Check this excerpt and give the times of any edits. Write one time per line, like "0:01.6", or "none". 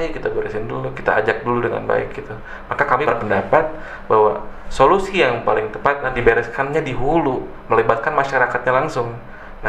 0:03.1
0:06.1